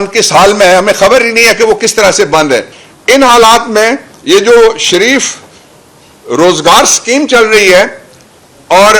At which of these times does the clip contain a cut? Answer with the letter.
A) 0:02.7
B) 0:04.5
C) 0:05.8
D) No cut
A